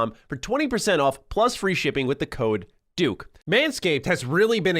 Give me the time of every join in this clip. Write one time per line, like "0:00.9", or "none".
0:03.4

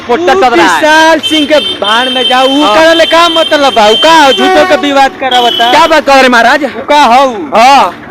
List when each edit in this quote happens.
none

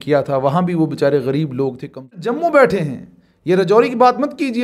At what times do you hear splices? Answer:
0:02.1

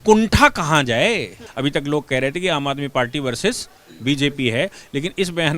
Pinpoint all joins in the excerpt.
0:01.5

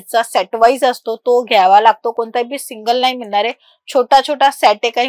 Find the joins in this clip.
none

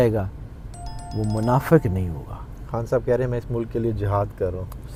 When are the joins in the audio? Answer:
none

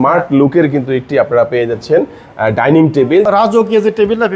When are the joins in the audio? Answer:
0:03.2

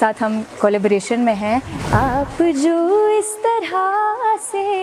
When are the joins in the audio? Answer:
0:01.8

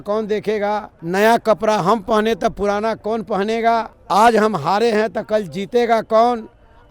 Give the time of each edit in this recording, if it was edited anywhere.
0:00.9
0:04.0

